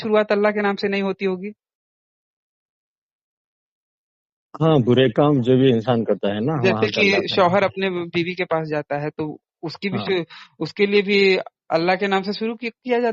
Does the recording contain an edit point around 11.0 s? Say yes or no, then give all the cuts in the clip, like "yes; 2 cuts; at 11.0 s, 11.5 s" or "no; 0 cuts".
no; 0 cuts